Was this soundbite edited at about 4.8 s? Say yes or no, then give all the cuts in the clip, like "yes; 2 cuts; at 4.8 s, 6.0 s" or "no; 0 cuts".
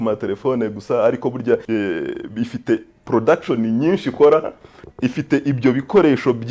yes; 2 cuts; at 1.6 s, 4.8 s